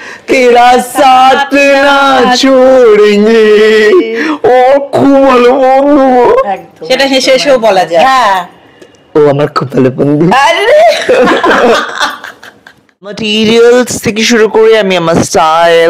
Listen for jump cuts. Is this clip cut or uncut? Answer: cut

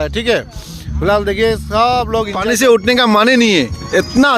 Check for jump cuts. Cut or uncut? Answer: cut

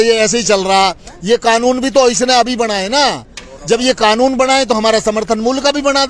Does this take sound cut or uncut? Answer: uncut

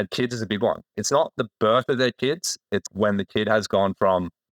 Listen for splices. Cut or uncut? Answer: cut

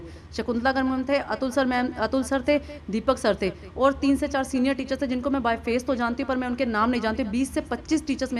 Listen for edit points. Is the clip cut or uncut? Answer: uncut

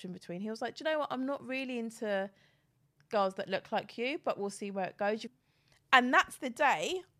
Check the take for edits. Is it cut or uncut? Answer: cut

